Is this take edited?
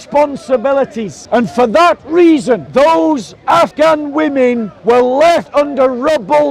yes; 5 cuts; at 1.1 s, 2.7 s, 3.7 s, 4.7 s, 5.5 s

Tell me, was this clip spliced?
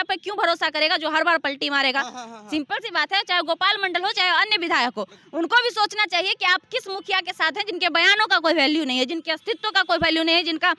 no; 0 cuts

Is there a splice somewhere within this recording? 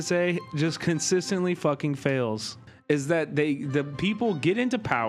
yes; 1 cut; at 2.6 s

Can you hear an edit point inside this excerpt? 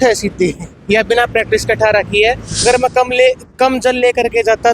yes; 1 cut; at 2.6 s

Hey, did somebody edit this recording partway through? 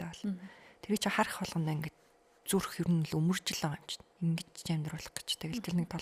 no; 0 cuts

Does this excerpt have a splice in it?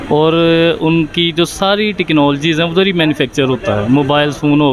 no; 0 cuts

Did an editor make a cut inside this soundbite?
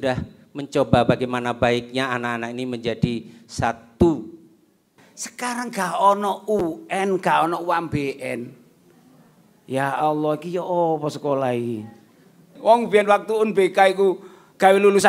yes; 2 cuts; at 5.0 s, 12.5 s

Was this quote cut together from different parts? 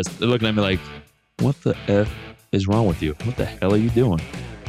no; 0 cuts

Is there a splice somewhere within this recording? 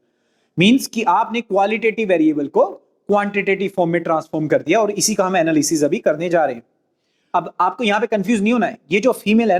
yes; 1 cut; at 7.2 s

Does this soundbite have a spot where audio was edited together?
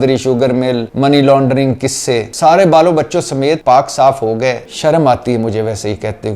yes; 4 cuts; at 0.9 s, 2.3 s, 3.6 s, 4.7 s

